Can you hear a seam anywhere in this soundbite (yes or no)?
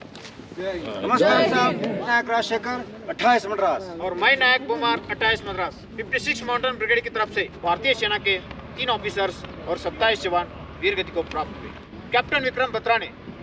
yes